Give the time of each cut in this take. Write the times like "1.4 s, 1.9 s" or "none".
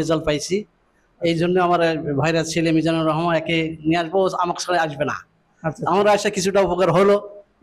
none